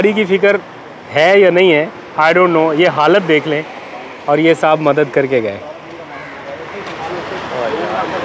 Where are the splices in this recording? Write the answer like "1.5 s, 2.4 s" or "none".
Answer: none